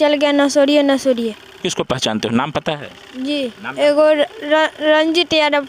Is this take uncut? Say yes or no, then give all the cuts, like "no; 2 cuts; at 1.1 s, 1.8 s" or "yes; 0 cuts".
no; 1 cut; at 1.6 s